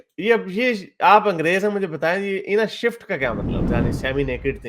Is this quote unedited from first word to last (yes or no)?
no